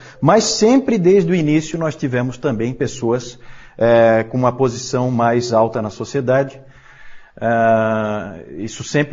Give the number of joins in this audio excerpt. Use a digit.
0